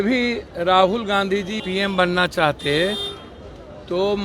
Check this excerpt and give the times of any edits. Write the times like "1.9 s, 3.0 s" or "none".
1.6 s